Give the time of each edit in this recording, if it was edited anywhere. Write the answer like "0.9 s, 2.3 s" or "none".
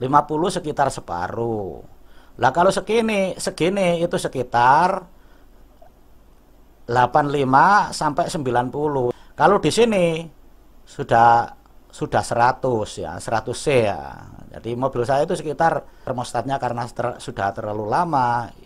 16.1 s